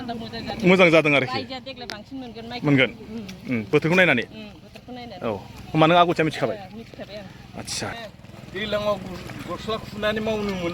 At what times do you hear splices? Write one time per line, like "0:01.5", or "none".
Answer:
0:07.9